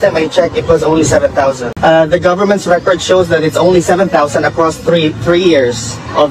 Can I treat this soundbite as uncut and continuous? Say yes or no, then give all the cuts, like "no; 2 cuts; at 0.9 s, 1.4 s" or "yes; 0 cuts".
no; 1 cut; at 1.7 s